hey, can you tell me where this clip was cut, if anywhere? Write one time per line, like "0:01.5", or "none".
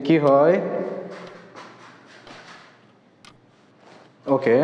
0:03.7